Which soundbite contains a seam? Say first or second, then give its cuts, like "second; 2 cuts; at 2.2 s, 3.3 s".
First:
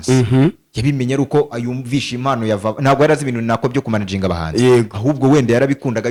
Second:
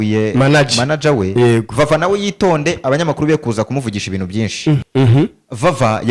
second; 1 cut; at 4.8 s